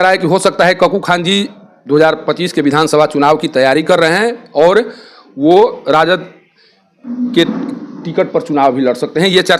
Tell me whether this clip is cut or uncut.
uncut